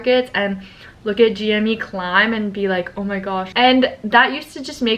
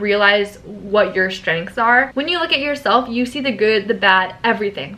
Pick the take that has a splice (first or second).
second